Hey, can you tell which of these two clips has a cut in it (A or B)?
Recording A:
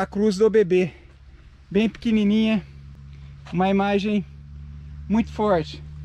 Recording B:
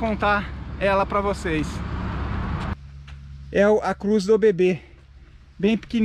B